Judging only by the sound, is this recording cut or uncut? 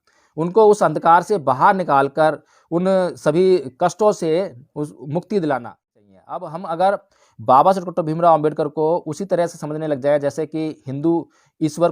cut